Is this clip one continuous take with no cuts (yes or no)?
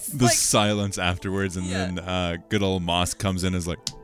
yes